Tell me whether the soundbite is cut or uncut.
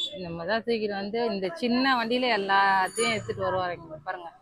uncut